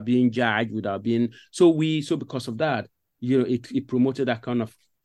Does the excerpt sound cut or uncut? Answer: uncut